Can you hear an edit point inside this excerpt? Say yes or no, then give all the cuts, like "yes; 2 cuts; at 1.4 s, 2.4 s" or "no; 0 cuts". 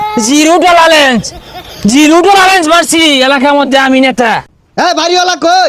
yes; 1 cut; at 4.6 s